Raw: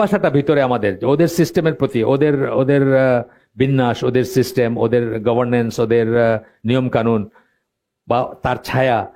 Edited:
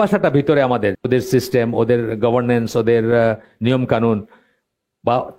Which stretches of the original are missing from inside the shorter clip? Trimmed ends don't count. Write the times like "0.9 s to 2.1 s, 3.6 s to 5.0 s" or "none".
1.0 s to 4.0 s